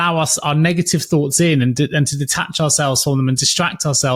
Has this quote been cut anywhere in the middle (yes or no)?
no